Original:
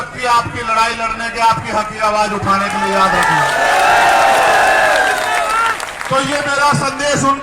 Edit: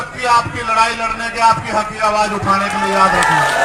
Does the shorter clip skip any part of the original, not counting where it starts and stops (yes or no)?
no